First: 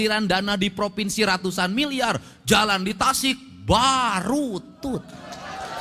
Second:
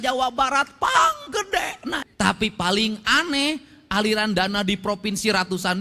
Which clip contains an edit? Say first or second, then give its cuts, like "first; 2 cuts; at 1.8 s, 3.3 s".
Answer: second; 1 cut; at 2.0 s